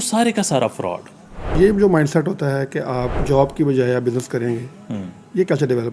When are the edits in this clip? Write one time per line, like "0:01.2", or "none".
0:01.6
0:03.1